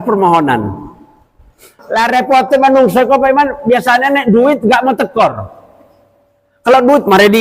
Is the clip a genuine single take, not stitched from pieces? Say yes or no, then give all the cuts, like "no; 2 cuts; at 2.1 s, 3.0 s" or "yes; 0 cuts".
no; 1 cut; at 1.6 s